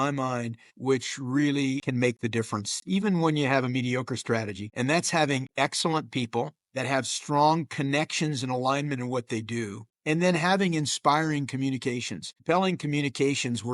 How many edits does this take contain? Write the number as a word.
one